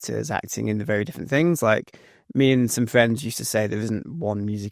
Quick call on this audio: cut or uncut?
uncut